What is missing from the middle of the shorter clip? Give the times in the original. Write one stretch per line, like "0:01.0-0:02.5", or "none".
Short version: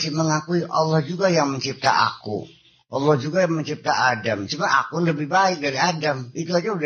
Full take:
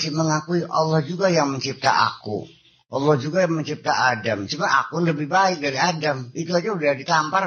none